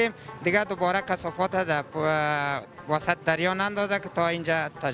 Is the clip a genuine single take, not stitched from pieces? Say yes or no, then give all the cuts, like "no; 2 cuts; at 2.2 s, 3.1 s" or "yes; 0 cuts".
yes; 0 cuts